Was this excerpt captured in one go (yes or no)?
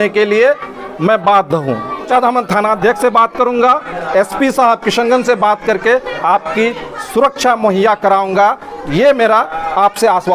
no